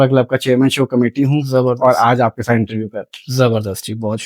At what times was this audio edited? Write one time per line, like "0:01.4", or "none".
none

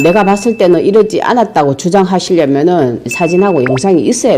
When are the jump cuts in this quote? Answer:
0:03.1

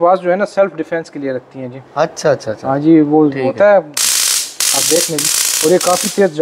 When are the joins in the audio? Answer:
none

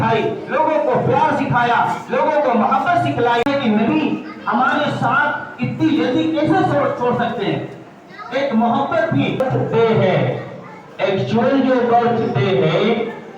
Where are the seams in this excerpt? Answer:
0:03.5
0:09.4

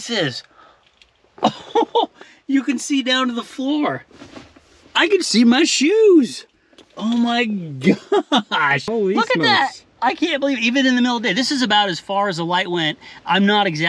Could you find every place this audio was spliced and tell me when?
0:08.9

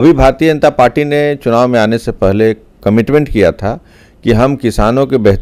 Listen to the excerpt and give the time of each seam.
none

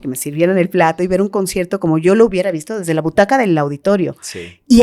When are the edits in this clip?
none

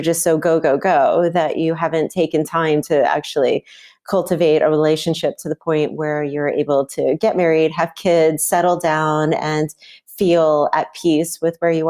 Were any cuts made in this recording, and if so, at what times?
none

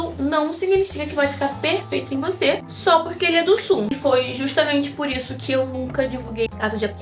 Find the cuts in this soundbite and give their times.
0:03.9

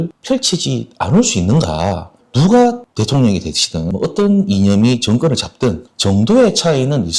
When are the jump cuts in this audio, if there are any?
none

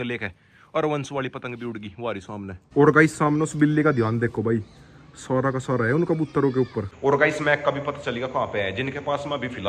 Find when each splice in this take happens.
0:02.5
0:06.9

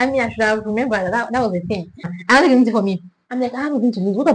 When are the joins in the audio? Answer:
0:02.1

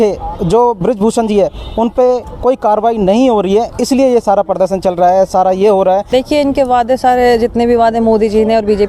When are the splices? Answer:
0:06.1

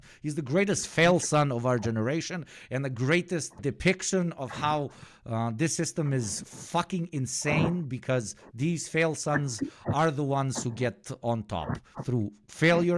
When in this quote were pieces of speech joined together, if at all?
none

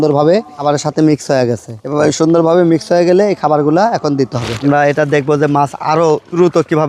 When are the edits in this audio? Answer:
0:04.5

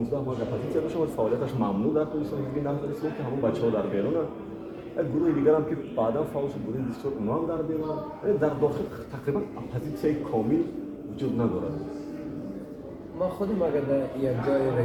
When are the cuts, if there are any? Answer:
none

